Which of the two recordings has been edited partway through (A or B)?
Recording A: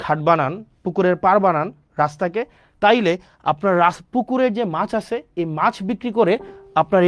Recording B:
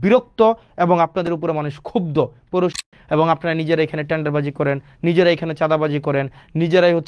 B